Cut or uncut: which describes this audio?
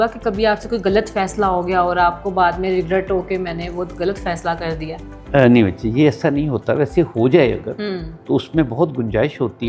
uncut